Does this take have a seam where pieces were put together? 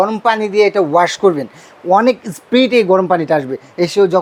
no; 0 cuts

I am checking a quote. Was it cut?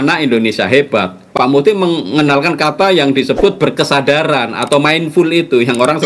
yes; 1 cut; at 1.2 s

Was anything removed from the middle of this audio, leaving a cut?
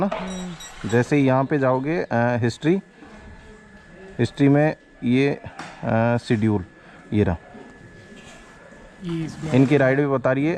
no; 0 cuts

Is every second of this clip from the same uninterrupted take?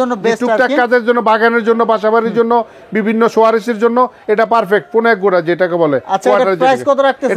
yes; 0 cuts

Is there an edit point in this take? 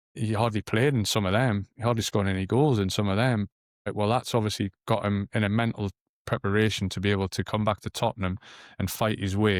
no; 0 cuts

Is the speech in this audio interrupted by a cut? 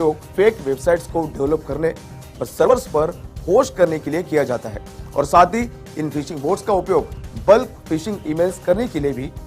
yes; 1 cut; at 2.7 s

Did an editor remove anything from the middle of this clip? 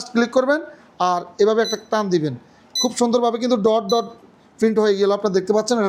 no; 0 cuts

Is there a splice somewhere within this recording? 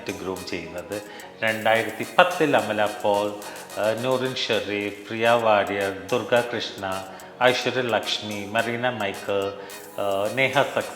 no; 0 cuts

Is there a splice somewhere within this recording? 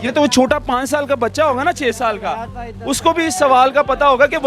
no; 0 cuts

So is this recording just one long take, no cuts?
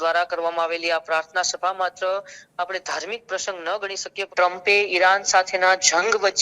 no; 1 cut; at 4.2 s

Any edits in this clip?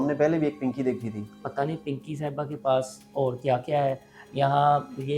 yes; 1 cut; at 1.4 s

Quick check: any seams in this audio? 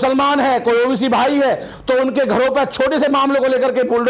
no; 0 cuts

